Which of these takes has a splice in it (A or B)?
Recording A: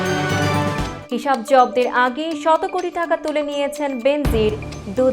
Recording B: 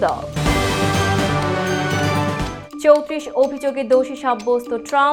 A